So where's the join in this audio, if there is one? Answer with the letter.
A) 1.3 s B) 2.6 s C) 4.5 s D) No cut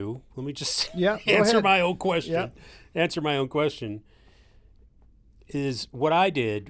D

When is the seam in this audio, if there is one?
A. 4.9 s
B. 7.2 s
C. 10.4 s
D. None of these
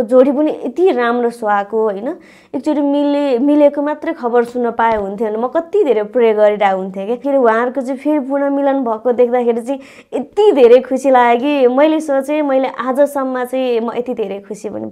B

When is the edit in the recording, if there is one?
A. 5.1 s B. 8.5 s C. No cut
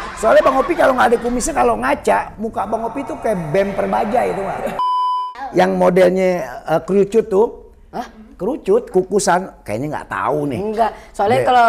A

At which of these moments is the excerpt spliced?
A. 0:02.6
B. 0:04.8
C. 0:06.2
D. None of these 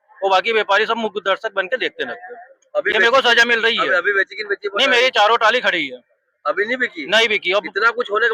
D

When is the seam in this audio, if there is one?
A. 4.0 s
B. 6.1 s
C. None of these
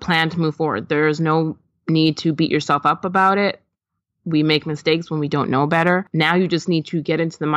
B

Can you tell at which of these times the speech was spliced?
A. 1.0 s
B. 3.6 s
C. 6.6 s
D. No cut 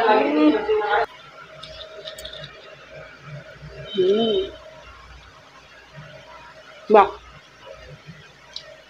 A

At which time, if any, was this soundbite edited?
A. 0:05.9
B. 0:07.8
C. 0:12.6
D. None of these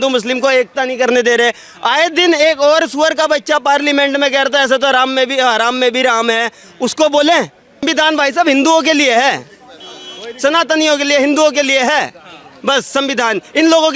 B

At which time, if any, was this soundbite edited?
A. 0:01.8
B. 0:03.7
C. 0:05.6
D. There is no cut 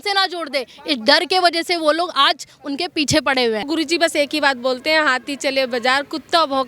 B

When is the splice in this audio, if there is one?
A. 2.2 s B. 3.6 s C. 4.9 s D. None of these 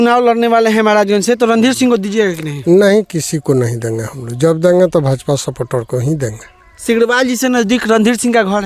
D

